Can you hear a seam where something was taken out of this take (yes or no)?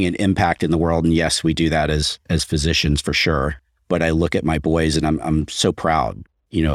no